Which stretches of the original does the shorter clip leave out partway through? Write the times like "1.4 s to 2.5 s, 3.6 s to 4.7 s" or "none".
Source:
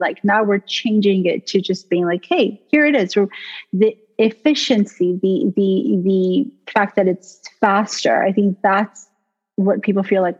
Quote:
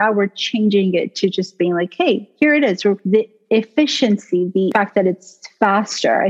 3.3 s to 3.7 s, 5.4 s to 6.7 s

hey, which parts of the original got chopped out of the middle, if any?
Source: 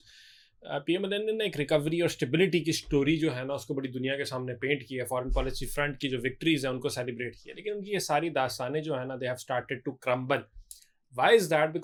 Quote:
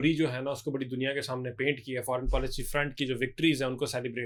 none

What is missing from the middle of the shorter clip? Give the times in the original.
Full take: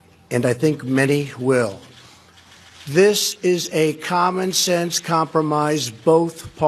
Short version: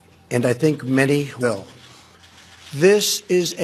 1.4 s to 1.6 s

